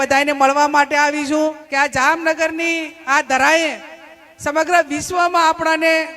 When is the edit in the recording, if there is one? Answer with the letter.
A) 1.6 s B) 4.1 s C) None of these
A